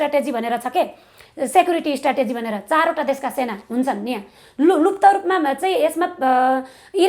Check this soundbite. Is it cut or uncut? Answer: uncut